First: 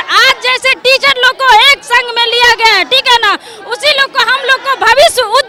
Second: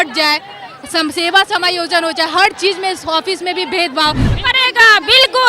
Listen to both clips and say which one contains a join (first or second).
second